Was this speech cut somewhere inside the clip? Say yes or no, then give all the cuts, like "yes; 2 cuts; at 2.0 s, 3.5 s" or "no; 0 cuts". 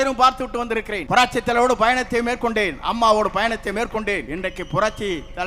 yes; 2 cuts; at 1.0 s, 4.3 s